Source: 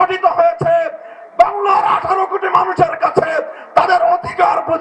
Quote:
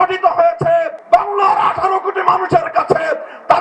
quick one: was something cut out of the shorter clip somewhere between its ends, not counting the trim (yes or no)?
yes